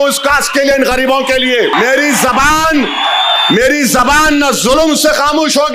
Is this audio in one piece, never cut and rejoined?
no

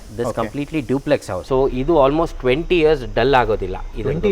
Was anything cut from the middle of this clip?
yes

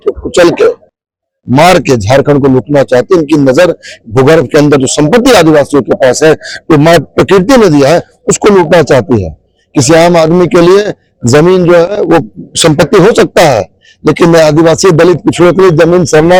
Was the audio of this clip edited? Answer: no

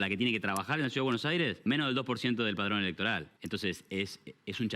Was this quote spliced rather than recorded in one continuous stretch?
yes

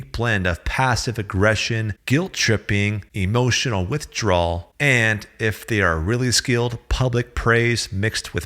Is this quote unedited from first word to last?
no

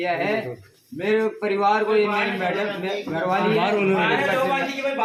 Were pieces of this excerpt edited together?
no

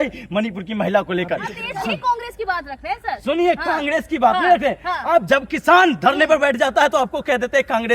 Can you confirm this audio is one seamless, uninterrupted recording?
no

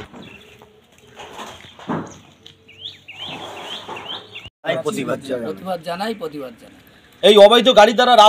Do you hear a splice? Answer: yes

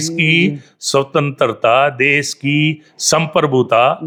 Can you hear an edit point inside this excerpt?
no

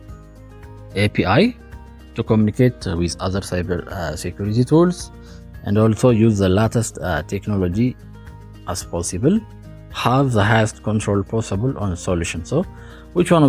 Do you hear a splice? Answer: no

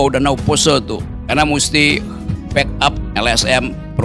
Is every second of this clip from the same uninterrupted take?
no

